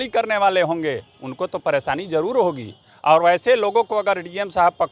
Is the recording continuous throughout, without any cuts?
yes; 0 cuts

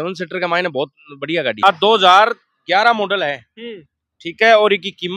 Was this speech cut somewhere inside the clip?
yes; 1 cut; at 1.6 s

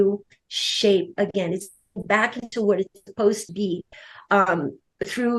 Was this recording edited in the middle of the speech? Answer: no; 0 cuts

